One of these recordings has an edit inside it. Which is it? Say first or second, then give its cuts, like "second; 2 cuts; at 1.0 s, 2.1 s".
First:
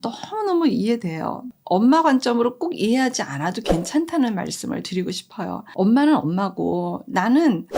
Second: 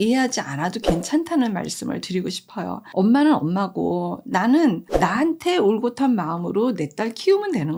first; 1 cut; at 1.4 s